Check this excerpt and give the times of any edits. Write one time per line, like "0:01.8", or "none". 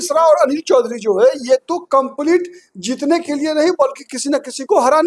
none

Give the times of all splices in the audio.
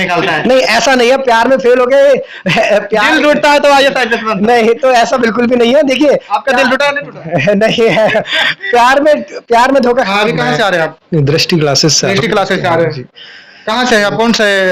0:10.1

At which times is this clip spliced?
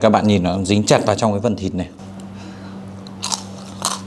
0:02.0

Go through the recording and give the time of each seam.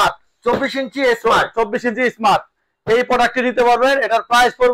none

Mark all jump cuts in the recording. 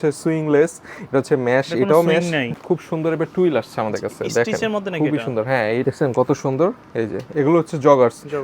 0:02.5
0:05.8

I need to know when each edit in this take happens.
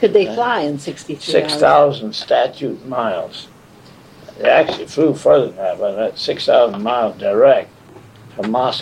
none

